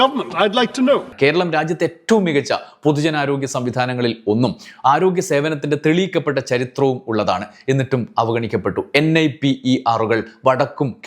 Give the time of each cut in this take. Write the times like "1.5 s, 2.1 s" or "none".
none